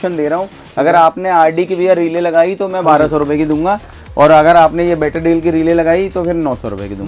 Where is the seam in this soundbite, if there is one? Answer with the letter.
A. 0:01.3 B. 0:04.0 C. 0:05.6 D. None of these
D